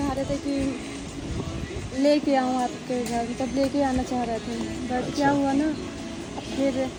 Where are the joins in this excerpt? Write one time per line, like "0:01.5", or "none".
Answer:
none